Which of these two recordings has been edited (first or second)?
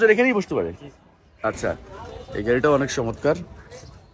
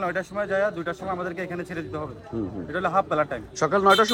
first